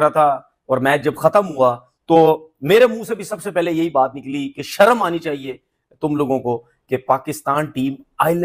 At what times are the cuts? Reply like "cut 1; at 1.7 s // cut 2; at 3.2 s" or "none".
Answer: none